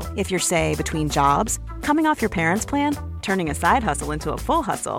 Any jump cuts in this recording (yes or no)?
no